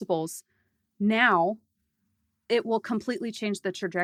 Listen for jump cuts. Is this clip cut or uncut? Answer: uncut